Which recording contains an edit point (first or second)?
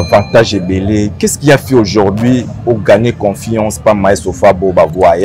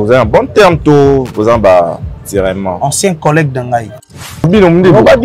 second